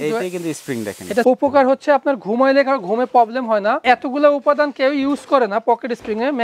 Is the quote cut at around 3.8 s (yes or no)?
yes